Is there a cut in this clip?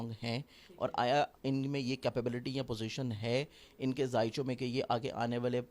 no; 0 cuts

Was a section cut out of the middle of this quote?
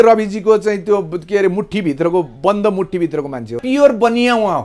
yes; 1 cut; at 3.6 s

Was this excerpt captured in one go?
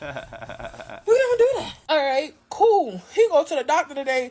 no; 1 cut; at 1.7 s

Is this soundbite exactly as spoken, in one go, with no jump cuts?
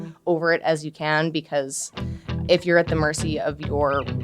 yes; 0 cuts

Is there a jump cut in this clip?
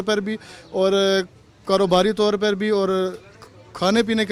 no; 0 cuts

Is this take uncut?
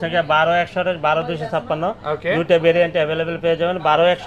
yes; 0 cuts

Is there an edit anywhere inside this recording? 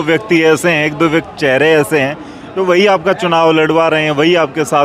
no; 0 cuts

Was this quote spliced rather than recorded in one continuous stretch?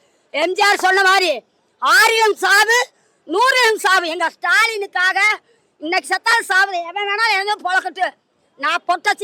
no; 0 cuts

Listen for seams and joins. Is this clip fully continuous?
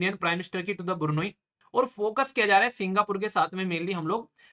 no; 1 cut; at 1.6 s

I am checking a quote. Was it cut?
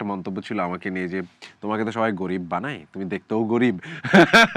no; 0 cuts

